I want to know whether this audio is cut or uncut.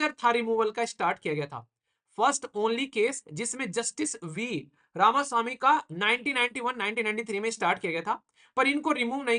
uncut